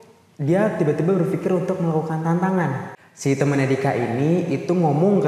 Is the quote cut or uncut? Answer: cut